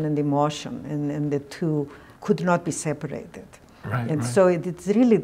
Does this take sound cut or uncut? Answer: cut